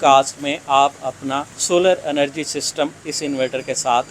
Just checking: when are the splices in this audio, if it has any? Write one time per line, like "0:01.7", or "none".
0:01.5